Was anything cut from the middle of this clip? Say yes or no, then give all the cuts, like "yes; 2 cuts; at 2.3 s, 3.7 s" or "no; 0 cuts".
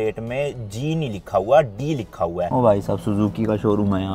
yes; 1 cut; at 2.5 s